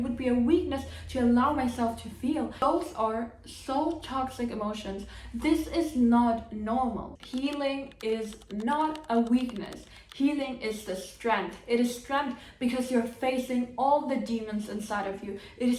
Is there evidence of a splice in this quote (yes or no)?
no